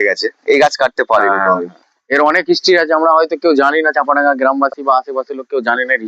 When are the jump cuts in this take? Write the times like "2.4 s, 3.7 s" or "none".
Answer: 1.9 s